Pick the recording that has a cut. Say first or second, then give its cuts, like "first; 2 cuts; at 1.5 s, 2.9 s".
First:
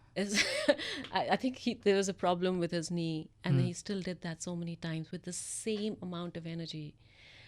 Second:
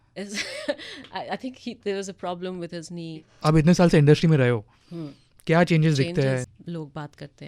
second; 2 cuts; at 3.3 s, 6.5 s